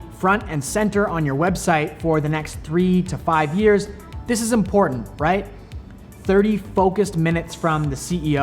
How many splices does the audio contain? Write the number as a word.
zero